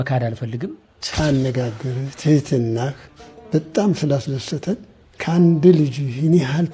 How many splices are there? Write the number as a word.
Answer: one